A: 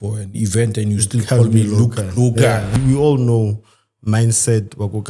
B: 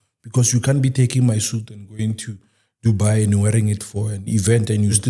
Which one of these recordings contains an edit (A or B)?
A